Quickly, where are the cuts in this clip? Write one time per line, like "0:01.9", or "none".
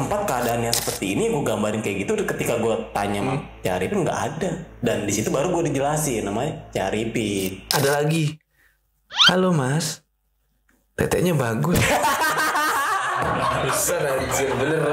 0:07.7